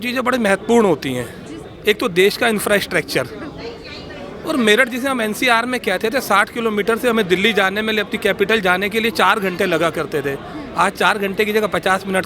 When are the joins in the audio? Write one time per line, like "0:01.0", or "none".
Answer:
none